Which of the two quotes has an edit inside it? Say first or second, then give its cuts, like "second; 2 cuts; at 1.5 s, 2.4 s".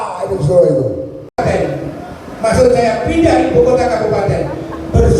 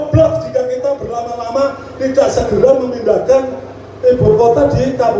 first; 1 cut; at 1.2 s